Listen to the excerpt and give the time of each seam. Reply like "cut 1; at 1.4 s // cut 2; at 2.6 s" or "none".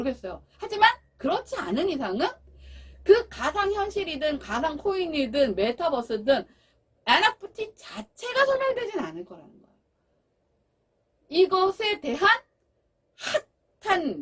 none